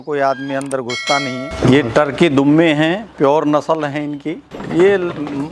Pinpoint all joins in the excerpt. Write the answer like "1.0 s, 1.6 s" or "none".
1.5 s, 4.5 s